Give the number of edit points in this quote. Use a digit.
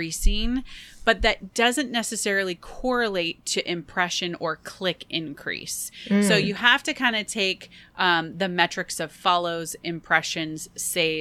0